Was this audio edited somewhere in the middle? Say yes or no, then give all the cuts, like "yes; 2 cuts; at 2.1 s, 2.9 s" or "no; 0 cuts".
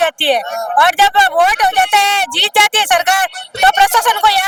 no; 0 cuts